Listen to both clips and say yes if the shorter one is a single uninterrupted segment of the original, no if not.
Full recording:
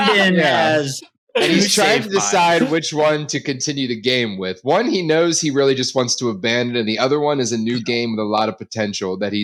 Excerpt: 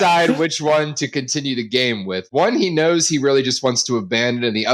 yes